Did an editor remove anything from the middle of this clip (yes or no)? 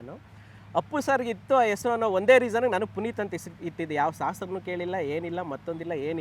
no